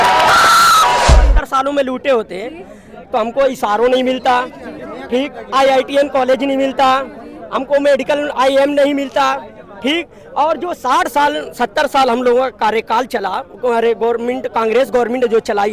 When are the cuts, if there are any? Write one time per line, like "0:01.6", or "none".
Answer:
0:01.0